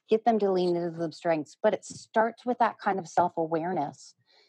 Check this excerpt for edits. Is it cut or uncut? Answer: uncut